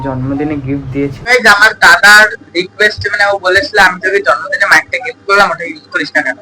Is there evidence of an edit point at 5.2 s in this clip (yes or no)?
no